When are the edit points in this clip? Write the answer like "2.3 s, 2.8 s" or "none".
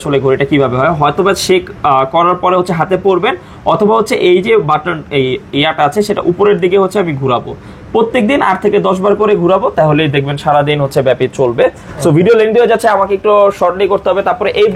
none